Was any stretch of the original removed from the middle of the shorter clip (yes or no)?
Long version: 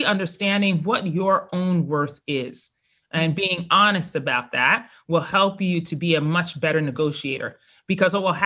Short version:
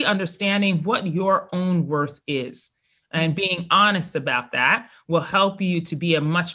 no